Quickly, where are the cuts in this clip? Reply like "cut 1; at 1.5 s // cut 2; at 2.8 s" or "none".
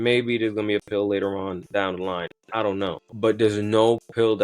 cut 1; at 3.1 s